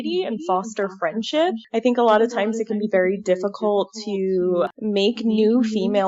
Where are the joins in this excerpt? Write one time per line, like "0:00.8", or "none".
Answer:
0:01.6
0:04.7